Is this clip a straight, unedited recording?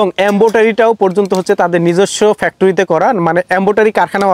yes; 0 cuts

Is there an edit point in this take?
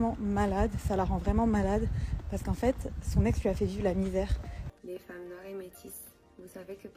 yes; 1 cut; at 4.7 s

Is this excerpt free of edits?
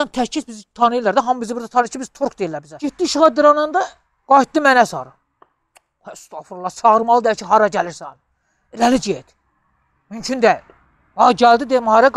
no; 1 cut; at 2.7 s

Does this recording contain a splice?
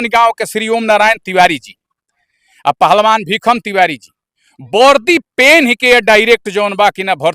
no; 0 cuts

